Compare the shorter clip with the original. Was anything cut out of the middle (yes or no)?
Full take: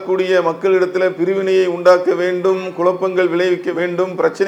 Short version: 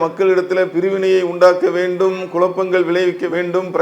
no